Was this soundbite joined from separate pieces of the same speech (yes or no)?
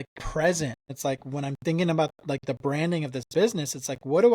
yes